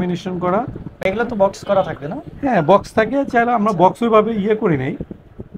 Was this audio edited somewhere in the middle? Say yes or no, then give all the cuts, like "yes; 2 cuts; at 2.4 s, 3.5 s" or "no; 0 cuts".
no; 0 cuts